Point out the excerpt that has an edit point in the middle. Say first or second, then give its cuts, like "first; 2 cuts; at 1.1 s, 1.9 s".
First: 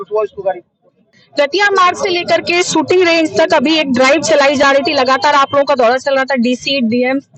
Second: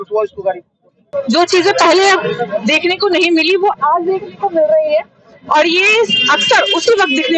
second; 1 cut; at 1.1 s